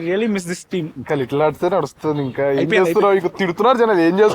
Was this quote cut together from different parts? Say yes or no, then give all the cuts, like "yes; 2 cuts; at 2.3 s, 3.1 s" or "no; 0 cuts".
yes; 1 cut; at 0.9 s